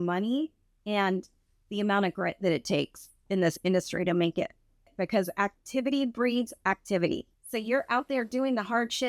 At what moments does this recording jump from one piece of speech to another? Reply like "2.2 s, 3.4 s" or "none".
4.9 s, 7.4 s